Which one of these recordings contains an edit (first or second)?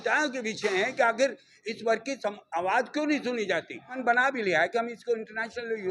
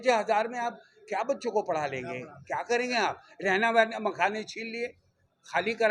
first